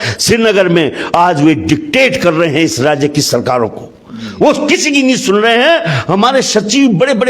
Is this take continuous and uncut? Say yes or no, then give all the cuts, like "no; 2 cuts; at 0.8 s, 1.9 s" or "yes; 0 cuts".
yes; 0 cuts